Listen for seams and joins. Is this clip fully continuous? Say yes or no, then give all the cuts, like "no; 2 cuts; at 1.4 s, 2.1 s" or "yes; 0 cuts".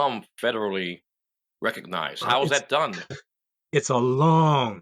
yes; 0 cuts